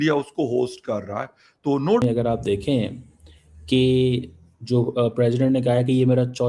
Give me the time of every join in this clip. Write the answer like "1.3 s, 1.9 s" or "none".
2.0 s